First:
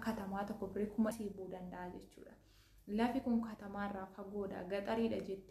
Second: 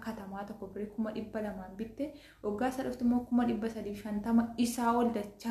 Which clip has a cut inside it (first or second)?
first